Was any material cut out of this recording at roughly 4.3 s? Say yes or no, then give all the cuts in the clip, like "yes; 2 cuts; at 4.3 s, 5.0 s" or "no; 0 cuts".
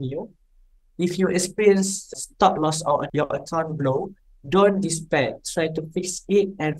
no; 2 cuts; at 2.1 s, 3.1 s